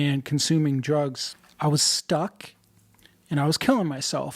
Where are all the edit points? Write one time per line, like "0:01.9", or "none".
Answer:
0:01.3